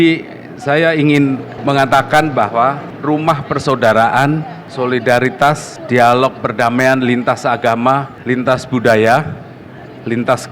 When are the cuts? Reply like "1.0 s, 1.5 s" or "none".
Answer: 1.5 s, 2.9 s, 4.6 s, 5.7 s, 8.1 s